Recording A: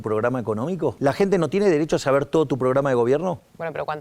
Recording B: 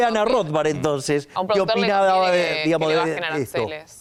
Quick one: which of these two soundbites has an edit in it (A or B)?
A